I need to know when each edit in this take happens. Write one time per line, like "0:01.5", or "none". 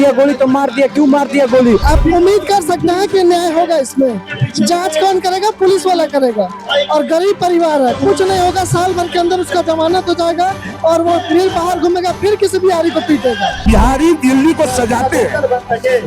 0:01.8
0:13.6